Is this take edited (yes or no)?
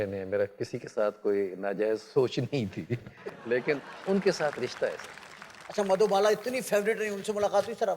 no